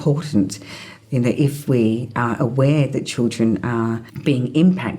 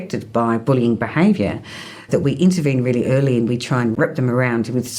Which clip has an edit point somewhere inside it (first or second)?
first